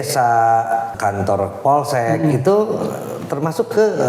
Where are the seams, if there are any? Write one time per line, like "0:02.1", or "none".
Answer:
0:00.9